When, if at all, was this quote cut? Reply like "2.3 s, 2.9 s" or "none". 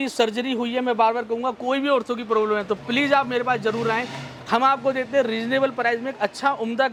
none